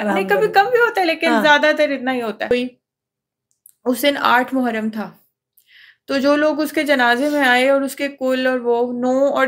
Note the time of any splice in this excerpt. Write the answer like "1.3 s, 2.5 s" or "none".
2.5 s